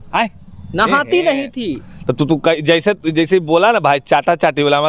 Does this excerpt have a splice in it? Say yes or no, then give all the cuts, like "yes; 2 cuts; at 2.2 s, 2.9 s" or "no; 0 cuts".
no; 0 cuts